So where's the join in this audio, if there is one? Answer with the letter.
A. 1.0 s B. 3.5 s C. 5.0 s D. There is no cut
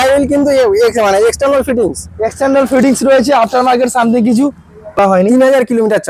C